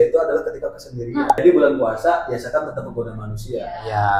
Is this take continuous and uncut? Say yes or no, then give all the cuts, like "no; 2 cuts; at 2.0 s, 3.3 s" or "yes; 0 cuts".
no; 1 cut; at 1.4 s